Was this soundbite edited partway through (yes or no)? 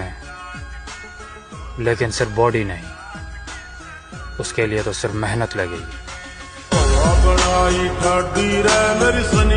no